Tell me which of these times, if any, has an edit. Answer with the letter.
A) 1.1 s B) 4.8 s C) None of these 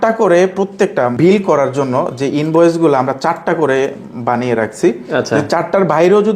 A